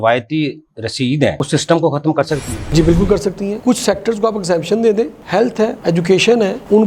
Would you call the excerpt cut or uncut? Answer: uncut